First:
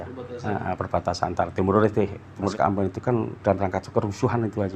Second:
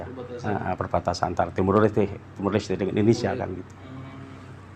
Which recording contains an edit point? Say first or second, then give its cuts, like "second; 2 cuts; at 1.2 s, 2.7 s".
first; 1 cut; at 2.5 s